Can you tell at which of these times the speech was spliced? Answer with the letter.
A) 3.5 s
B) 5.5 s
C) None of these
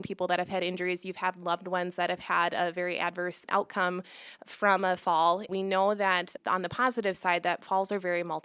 B